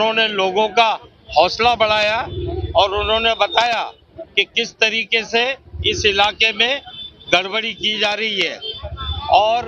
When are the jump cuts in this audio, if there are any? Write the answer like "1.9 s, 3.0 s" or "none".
none